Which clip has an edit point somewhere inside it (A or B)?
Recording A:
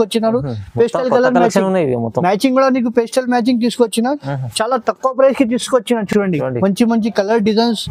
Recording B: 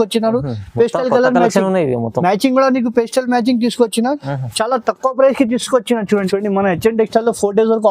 B